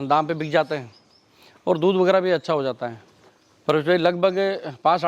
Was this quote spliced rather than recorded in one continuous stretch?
yes; 1 cut; at 2.9 s

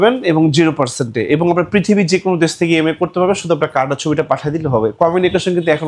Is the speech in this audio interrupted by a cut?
no; 0 cuts

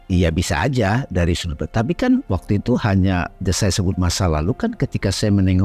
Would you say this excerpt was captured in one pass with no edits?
no; 1 cut; at 2.3 s

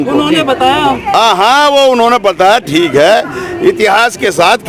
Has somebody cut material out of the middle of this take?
no; 0 cuts

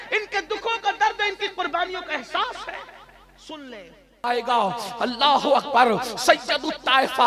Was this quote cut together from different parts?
yes; 1 cut; at 4.2 s

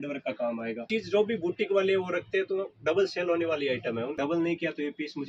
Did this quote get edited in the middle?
yes; 2 cuts; at 0.9 s, 4.2 s

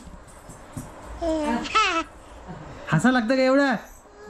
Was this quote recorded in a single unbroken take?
yes; 0 cuts

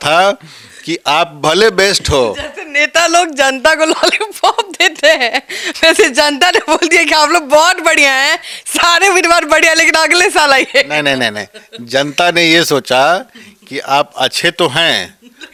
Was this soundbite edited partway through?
no; 0 cuts

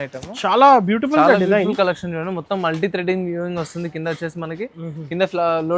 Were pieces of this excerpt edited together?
no; 0 cuts

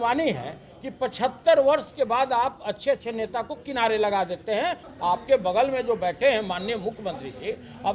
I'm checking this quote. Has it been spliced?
yes; 1 cut; at 4.9 s

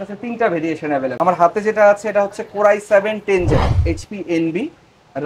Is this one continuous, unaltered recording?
no; 1 cut; at 3.7 s

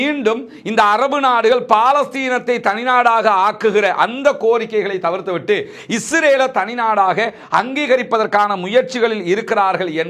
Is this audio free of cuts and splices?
yes; 0 cuts

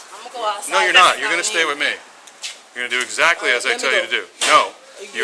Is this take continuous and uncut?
yes; 0 cuts

